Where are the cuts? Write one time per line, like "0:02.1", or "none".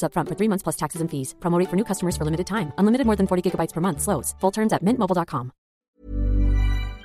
0:05.8